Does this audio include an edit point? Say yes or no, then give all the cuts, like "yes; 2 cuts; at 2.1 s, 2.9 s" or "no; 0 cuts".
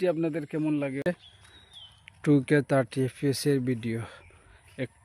yes; 1 cut; at 1.1 s